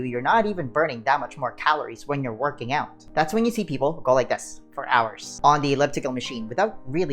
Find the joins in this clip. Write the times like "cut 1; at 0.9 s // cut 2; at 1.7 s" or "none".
cut 1; at 3.0 s

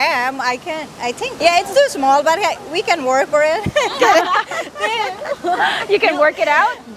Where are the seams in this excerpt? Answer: cut 1; at 1.3 s

